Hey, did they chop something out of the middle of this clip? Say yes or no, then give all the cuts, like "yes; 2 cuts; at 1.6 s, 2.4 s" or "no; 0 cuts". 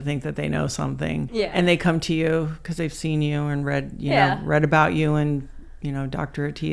yes; 1 cut; at 1.3 s